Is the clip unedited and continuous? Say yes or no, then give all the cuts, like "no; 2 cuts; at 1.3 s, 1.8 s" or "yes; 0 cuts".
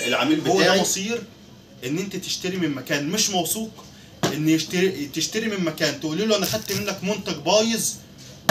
no; 1 cut; at 0.9 s